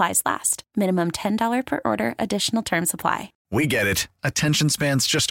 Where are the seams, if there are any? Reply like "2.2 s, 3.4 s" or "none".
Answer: 3.3 s